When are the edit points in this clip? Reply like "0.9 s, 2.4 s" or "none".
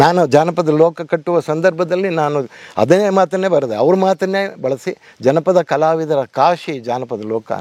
none